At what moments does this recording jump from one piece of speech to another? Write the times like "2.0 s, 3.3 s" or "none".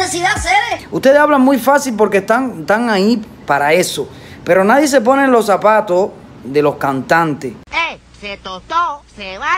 7.6 s